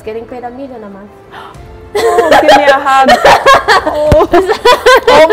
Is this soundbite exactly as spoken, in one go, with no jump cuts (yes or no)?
yes